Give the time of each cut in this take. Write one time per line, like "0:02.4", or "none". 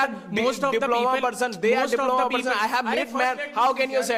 none